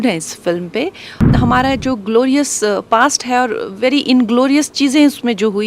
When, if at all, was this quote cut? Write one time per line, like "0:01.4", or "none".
0:01.3